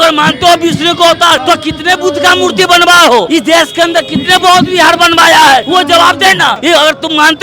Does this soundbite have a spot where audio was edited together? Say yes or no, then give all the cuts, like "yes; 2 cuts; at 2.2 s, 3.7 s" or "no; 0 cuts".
yes; 4 cuts; at 1.4 s, 3.3 s, 5.6 s, 6.6 s